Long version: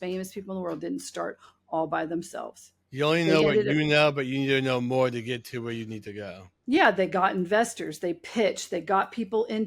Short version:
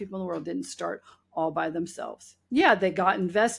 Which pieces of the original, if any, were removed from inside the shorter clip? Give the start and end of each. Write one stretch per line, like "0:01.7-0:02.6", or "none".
0:02.7-0:06.5